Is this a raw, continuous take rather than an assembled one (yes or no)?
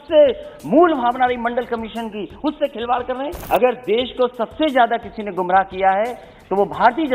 no